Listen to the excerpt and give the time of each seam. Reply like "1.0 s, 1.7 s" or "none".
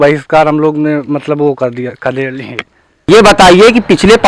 3.1 s